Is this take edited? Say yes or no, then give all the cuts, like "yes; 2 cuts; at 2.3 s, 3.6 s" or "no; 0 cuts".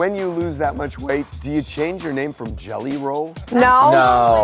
yes; 1 cut; at 1.4 s